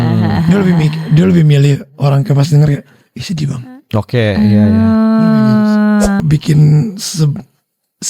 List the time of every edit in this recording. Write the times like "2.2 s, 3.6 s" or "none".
6.2 s